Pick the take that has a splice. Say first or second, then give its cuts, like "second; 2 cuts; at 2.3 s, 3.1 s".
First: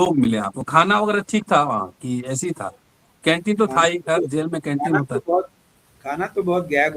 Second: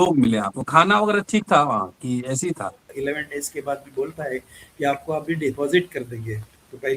second; 1 cut; at 2.9 s